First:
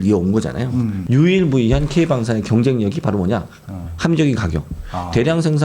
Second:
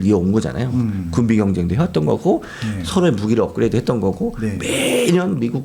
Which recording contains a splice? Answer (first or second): first